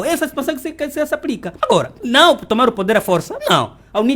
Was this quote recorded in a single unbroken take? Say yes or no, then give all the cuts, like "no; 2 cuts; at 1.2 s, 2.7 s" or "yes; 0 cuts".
no; 1 cut; at 1.7 s